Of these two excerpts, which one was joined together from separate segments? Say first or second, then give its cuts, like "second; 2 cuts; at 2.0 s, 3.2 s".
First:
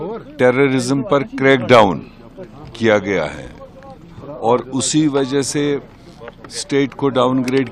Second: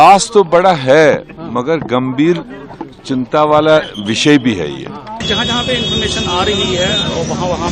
second; 1 cut; at 5.2 s